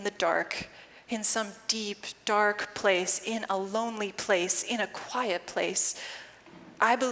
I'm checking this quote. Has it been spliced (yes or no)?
no